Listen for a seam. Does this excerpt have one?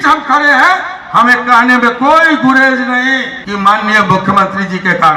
yes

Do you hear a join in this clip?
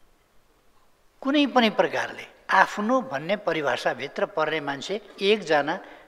no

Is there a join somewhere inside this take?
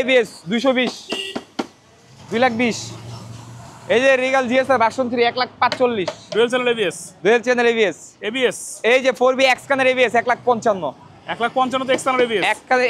no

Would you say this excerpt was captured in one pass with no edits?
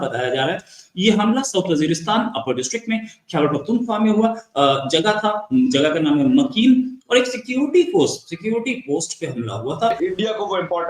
no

